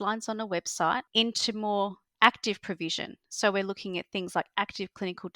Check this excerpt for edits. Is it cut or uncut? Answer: cut